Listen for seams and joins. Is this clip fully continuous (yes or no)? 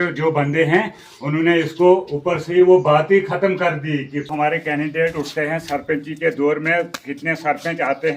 no